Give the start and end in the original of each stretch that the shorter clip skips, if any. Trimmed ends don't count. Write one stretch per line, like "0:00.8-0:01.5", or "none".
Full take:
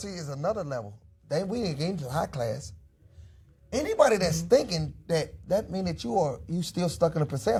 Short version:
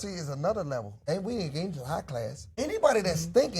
0:00.9-0:01.2
0:02.7-0:03.6